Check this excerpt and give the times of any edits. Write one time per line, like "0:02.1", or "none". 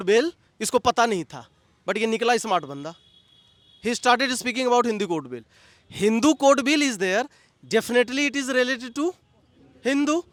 none